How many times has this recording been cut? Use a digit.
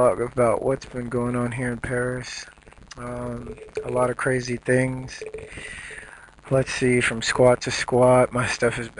0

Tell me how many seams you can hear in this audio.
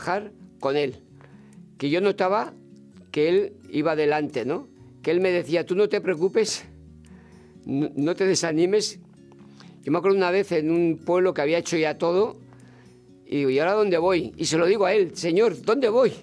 0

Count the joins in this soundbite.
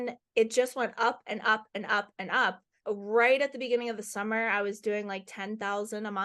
1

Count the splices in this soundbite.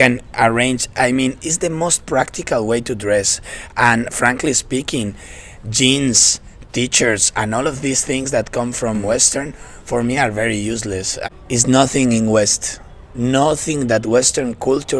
2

